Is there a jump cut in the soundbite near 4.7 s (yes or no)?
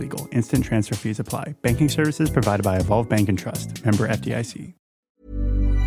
yes